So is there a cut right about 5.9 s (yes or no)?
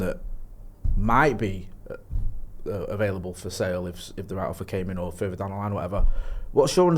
no